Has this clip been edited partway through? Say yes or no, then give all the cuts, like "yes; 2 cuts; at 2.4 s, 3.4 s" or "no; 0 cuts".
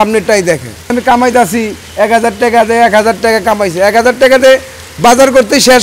yes; 1 cut; at 0.9 s